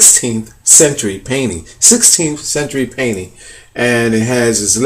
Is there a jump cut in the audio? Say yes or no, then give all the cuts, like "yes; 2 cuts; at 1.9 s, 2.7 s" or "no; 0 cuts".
yes; 1 cut; at 3.4 s